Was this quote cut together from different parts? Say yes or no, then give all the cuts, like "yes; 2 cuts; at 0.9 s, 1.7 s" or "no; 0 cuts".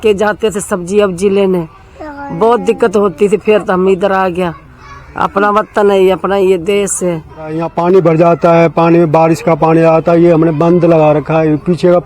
yes; 1 cut; at 7.7 s